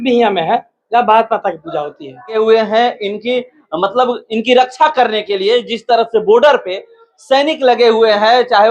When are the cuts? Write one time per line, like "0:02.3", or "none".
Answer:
0:02.4